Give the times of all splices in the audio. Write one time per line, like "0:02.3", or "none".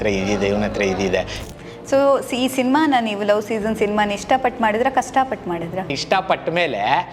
0:01.4
0:06.0